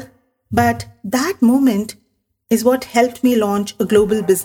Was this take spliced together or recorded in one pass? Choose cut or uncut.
uncut